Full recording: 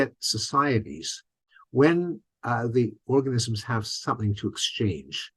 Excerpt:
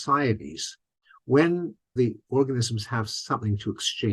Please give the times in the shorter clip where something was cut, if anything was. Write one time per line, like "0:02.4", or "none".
0:01.9